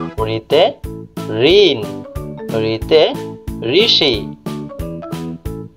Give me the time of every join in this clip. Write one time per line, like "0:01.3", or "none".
0:04.2